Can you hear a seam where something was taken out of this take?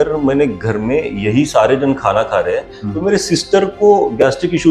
no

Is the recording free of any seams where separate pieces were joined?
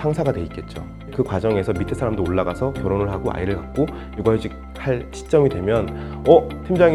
yes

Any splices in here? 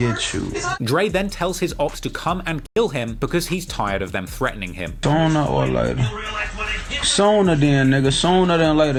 no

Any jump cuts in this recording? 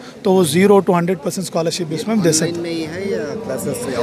no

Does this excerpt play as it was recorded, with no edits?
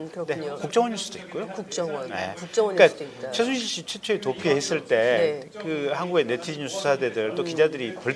no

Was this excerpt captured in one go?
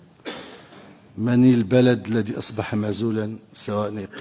yes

